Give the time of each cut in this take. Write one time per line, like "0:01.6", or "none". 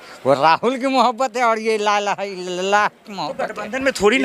none